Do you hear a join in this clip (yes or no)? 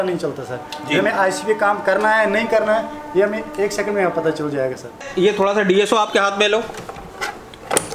yes